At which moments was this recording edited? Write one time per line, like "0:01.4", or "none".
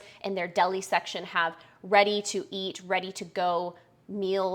none